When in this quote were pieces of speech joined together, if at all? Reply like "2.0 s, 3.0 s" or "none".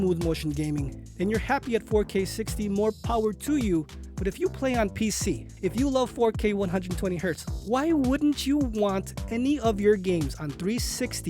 4.0 s